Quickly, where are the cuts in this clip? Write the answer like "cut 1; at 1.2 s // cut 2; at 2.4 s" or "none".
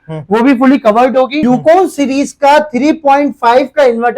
cut 1; at 1.4 s